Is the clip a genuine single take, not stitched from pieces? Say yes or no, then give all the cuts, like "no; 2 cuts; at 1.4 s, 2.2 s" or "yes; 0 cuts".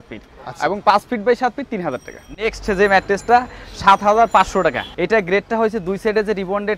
yes; 0 cuts